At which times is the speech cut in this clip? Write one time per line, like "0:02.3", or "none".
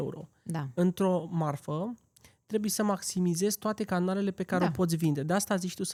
none